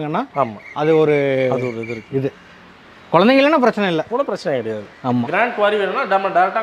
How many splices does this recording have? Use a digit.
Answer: 1